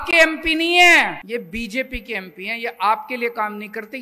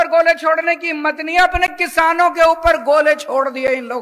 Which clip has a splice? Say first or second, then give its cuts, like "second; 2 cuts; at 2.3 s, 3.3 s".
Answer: first; 1 cut; at 1.2 s